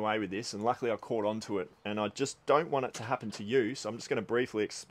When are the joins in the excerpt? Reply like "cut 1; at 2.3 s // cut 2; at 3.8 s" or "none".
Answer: none